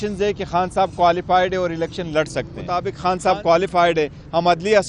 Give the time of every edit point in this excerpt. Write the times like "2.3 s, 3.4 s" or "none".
2.8 s